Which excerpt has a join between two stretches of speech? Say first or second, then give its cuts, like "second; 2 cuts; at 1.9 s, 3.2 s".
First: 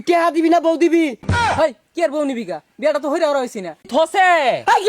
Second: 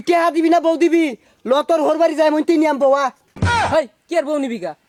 first; 2 cuts; at 1.3 s, 3.9 s